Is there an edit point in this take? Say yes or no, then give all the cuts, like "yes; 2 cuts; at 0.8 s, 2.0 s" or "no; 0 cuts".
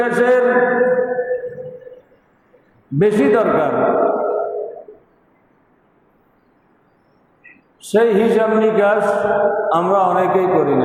no; 0 cuts